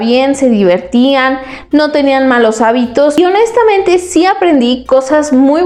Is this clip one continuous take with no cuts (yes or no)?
yes